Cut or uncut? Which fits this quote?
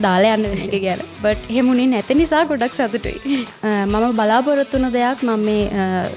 cut